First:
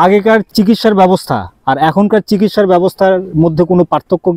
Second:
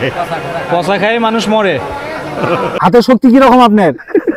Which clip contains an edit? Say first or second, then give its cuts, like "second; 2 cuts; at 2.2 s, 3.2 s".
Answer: second; 1 cut; at 2.8 s